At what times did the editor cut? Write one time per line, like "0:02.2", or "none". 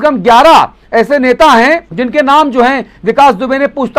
0:01.9

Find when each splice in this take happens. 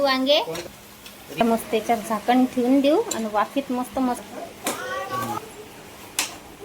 0:01.4
0:04.2

